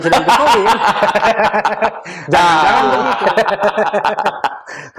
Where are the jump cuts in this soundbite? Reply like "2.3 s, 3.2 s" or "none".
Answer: 3.1 s